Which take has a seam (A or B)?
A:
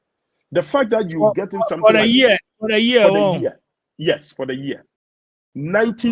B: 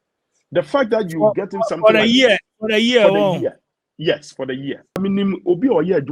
B